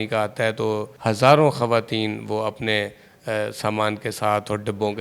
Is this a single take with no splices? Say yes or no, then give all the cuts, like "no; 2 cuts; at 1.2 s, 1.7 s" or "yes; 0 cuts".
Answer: no; 1 cut; at 0.9 s